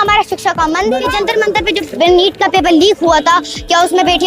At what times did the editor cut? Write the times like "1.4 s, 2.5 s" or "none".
1.1 s